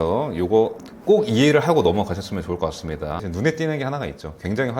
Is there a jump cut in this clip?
yes; 1 cut; at 3.2 s

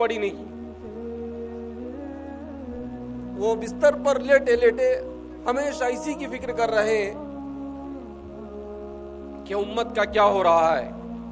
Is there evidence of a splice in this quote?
no; 0 cuts

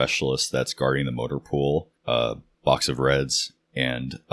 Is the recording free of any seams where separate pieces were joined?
no; 1 cut; at 2.3 s

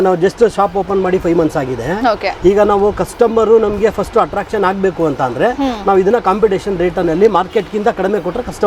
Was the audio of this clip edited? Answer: no; 0 cuts

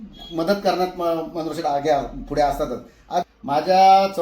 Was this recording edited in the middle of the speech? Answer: yes; 1 cut; at 3.2 s

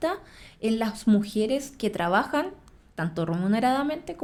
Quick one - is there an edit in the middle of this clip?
no; 0 cuts

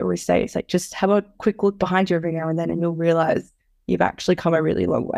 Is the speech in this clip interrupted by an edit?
no; 0 cuts

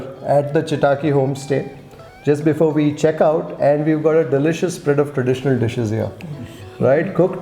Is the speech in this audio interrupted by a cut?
no; 0 cuts

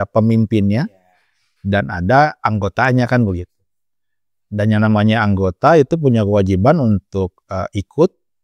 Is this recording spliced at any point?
no; 0 cuts

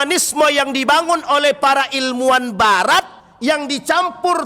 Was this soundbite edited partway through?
yes; 1 cut; at 3.2 s

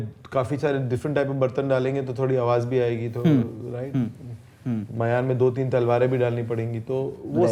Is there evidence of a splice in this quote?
no; 0 cuts

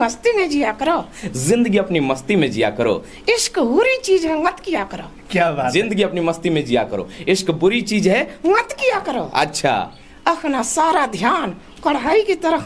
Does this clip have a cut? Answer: no; 0 cuts

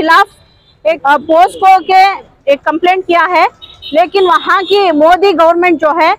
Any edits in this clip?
yes; 2 cuts; at 1.0 s, 2.3 s

